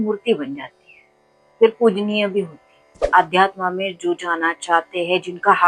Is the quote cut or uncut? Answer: cut